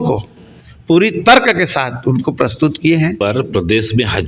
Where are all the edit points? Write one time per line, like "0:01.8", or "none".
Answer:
0:03.2